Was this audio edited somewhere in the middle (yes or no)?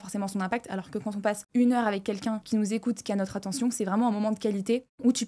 no